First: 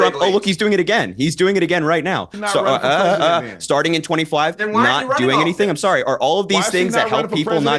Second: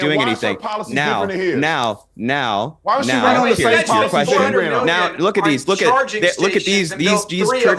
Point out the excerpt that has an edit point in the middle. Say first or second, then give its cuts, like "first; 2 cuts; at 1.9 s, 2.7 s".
first; 1 cut; at 2.3 s